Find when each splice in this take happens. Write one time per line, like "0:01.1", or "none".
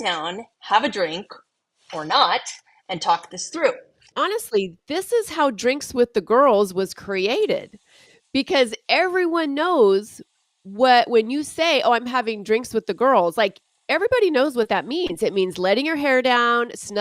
0:04.1

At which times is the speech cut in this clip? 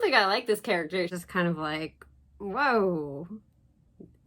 0:01.2

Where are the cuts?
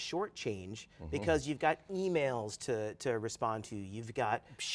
none

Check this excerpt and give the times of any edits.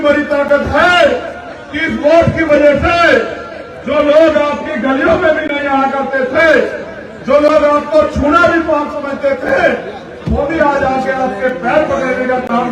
none

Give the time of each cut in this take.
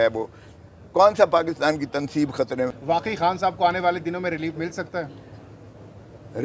0:02.7

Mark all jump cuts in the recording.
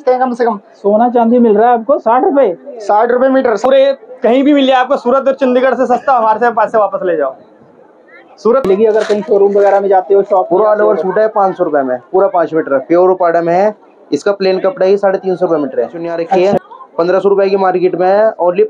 0:03.7
0:08.6
0:16.4

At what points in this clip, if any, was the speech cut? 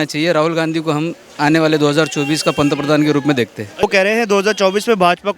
0:03.8

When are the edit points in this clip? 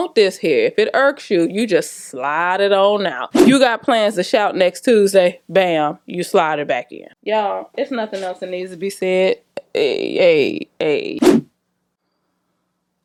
none

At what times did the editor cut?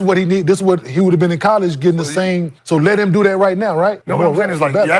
0:02.5
0:04.0

